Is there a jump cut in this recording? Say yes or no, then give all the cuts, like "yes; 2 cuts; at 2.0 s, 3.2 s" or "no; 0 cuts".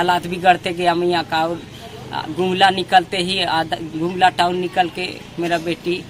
no; 0 cuts